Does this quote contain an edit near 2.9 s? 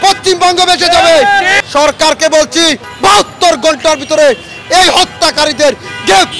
yes; 2 cuts; at 1.6 s, 2.9 s

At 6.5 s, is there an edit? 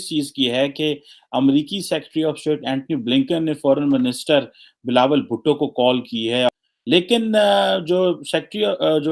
yes; 1 cut; at 6.5 s

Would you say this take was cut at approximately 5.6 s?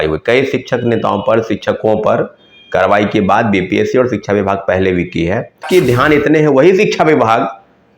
yes; 1 cut; at 5.6 s

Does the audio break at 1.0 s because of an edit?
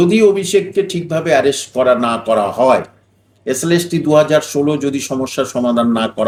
no; 0 cuts

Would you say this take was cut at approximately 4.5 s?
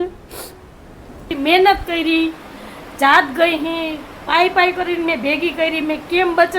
no; 1 cut; at 1.4 s

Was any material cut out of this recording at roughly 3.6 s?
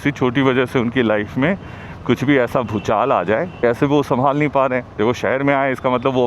yes; 1 cut; at 3.6 s

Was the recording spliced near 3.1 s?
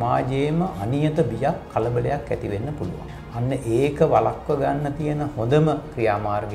yes; 1 cut; at 3.1 s

